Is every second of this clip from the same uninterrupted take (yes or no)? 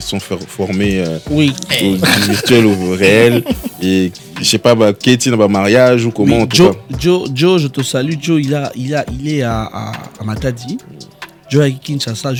yes